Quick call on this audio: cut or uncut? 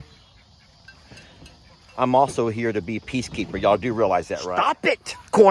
cut